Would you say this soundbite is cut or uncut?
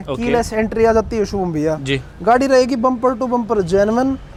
uncut